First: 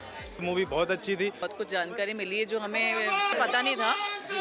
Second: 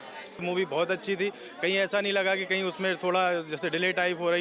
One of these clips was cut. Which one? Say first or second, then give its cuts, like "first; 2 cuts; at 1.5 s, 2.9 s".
first; 2 cuts; at 1.4 s, 3.3 s